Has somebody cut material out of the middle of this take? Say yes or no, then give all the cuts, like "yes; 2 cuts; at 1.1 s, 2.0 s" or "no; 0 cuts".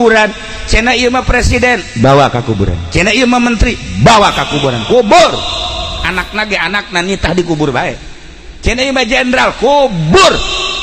no; 0 cuts